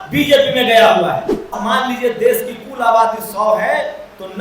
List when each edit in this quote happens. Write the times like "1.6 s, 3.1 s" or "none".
1.6 s